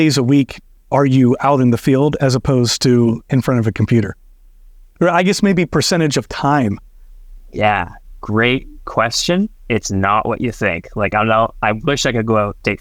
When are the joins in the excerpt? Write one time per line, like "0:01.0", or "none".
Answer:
none